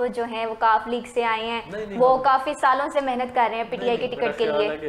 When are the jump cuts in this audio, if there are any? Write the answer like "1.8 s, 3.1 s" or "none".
none